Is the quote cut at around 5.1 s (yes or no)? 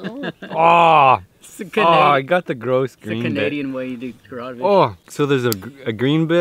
yes